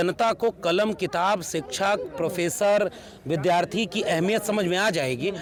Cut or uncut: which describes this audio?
uncut